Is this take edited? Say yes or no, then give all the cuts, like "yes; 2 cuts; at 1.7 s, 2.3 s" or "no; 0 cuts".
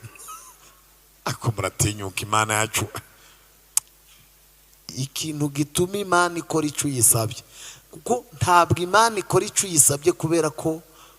yes; 1 cut; at 3.9 s